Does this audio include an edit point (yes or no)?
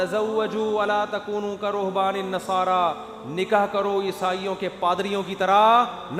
no